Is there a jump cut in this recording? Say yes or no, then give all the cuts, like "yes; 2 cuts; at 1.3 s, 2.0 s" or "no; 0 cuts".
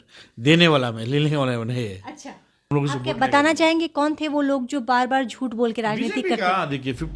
yes; 1 cut; at 2.5 s